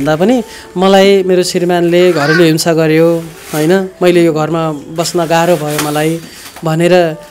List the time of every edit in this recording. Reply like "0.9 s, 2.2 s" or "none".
none